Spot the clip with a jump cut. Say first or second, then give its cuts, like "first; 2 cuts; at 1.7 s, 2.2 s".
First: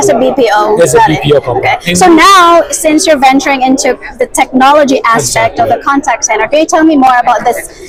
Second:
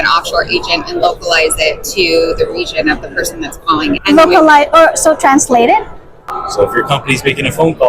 second; 2 cuts; at 4.0 s, 6.2 s